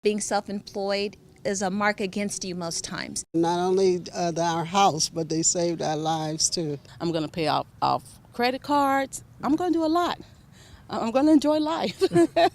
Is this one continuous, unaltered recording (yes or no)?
no